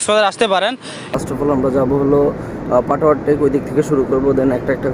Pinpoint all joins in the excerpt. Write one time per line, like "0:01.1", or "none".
0:01.1